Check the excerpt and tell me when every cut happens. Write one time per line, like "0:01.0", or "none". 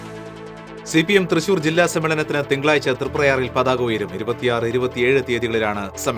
0:00.9